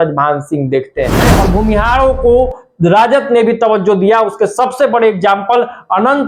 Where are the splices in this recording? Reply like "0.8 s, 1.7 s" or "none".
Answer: 1.3 s